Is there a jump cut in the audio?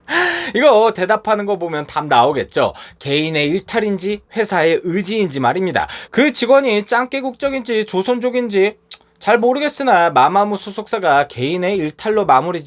yes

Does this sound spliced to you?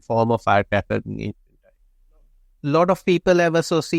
yes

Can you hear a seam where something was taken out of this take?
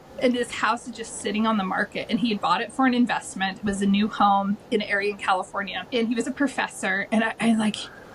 yes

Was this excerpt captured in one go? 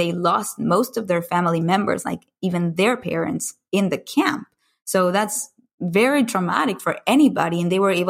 yes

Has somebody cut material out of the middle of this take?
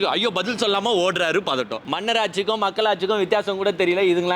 yes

